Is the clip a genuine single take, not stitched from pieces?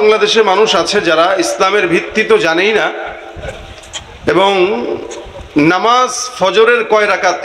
yes; 0 cuts

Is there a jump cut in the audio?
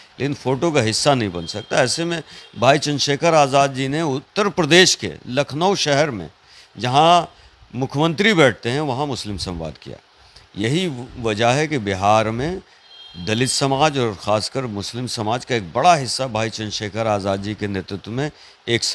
no; 0 cuts

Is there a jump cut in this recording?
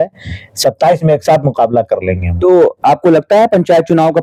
no; 0 cuts

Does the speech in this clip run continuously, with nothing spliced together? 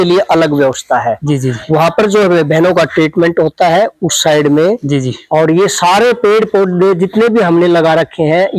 yes; 0 cuts

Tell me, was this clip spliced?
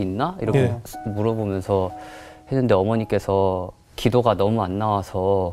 yes; 1 cut; at 3.8 s

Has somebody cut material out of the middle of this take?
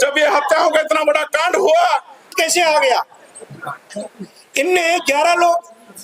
yes; 1 cut; at 2.3 s

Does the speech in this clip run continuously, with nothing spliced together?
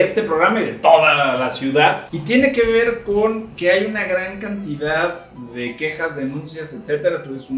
no; 1 cut; at 2.1 s

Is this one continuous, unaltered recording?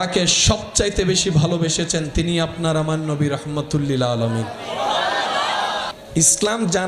no; 1 cut; at 6.0 s

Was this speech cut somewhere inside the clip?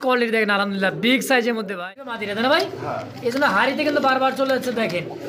yes; 1 cut; at 2.2 s

